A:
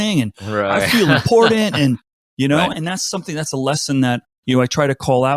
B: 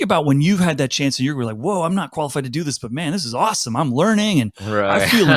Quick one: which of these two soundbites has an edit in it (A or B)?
A